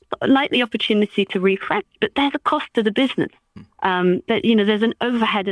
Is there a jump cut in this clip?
no; 0 cuts

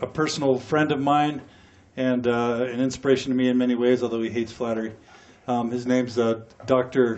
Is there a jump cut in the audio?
yes; 1 cut; at 2.8 s

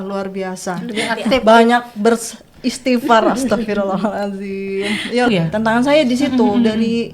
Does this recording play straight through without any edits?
no; 1 cut; at 5.3 s

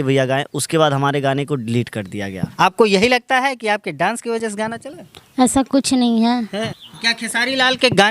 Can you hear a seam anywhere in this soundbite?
yes; 2 cuts; at 2.4 s, 6.5 s

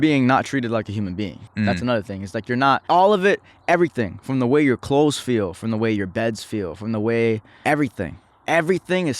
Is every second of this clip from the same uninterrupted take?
no; 3 cuts; at 1.4 s, 2.8 s, 7.5 s

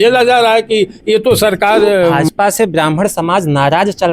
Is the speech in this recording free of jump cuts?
no; 1 cut; at 2.2 s

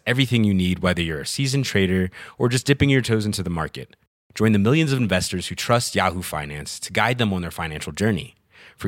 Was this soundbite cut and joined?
no; 0 cuts

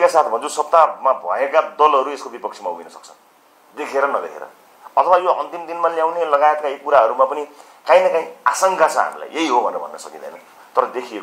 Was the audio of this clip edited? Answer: no; 0 cuts

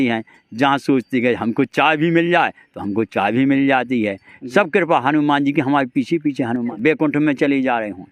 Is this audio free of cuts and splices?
no; 1 cut; at 6.7 s

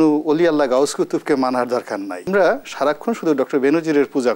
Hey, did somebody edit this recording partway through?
yes; 1 cut; at 2.3 s

